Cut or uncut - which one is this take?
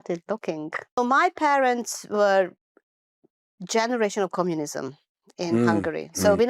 cut